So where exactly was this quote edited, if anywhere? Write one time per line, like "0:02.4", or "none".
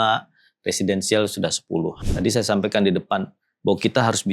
0:02.0

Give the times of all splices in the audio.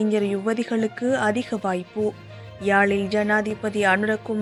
none

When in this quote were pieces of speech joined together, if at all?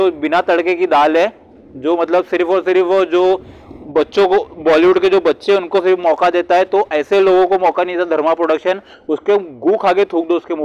none

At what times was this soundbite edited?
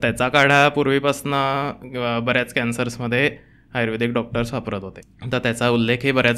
none

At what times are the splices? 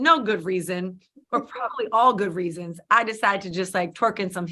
none

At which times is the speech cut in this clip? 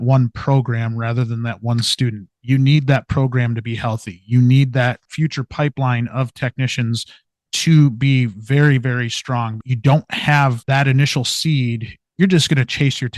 0:05.1
0:09.6
0:10.6
0:11.9

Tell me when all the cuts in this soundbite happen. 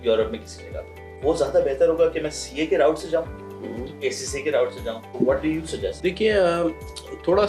0:01.1
0:04.0
0:05.1
0:06.0

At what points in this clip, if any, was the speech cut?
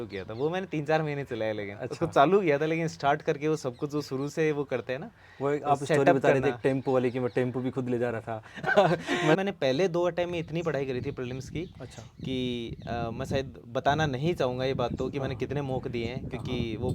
0:09.4

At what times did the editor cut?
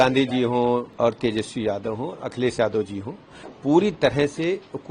0:00.9

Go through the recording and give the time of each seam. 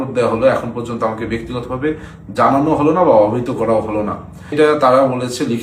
0:04.6

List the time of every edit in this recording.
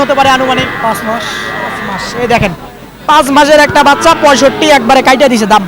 none

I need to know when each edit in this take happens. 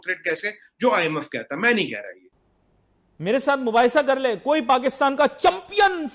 0:02.4

